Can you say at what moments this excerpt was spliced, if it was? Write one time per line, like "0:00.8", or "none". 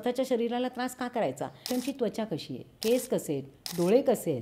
0:01.7